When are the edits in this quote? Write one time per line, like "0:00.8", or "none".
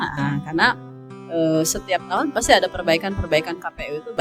none